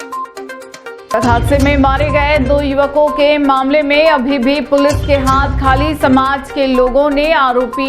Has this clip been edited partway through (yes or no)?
no